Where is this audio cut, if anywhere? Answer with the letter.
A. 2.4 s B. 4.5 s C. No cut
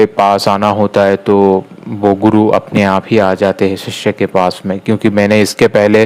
C